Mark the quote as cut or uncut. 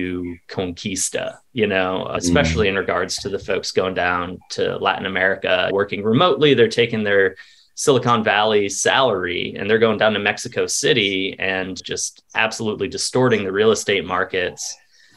cut